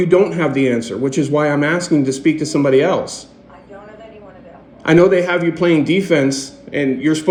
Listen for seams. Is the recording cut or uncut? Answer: uncut